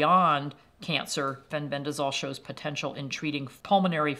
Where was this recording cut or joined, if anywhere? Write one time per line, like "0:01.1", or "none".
none